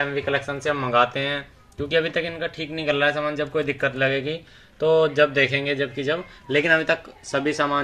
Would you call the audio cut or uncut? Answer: uncut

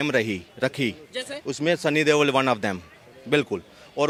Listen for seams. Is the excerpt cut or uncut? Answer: uncut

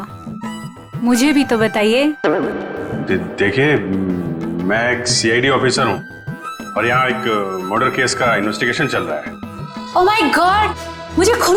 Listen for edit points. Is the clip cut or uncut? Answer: uncut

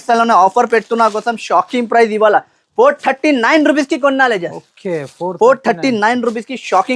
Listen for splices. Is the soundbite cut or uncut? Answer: uncut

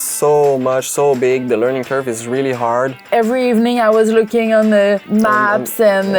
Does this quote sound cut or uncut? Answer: cut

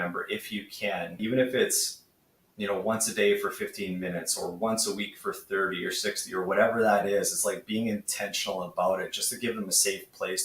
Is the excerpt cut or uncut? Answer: cut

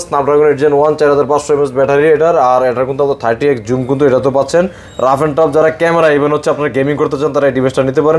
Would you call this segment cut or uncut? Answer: uncut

